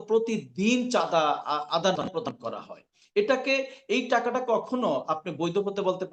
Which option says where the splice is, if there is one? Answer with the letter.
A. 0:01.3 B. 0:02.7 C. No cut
C